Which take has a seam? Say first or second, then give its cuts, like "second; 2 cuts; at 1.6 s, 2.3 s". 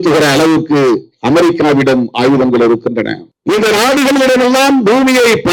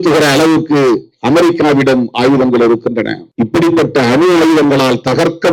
second; 1 cut; at 3.3 s